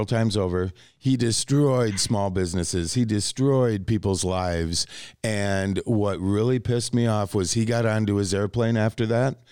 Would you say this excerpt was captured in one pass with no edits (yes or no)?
yes